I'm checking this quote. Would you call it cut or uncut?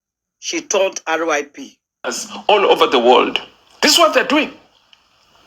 cut